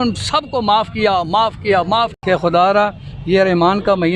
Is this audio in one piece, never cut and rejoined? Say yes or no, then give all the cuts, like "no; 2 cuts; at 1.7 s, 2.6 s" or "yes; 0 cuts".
no; 1 cut; at 2.1 s